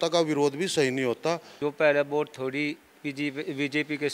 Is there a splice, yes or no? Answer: yes